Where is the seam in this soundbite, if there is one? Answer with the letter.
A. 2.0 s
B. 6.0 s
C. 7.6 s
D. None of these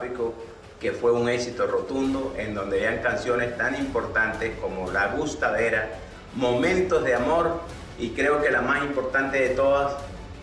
D